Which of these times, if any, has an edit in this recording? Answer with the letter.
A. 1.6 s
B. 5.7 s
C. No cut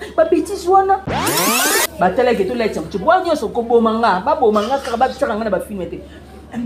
A